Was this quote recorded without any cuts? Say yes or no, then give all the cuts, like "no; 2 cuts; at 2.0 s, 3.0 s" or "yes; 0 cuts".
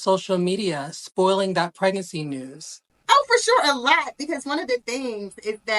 yes; 0 cuts